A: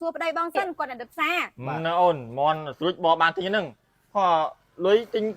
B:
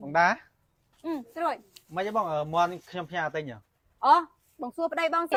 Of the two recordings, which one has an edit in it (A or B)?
A